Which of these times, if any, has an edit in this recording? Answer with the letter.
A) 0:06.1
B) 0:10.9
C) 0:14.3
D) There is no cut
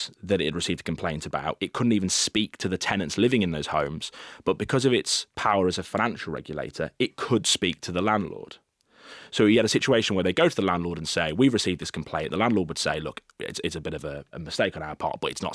C